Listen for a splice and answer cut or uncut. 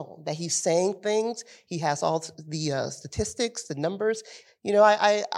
cut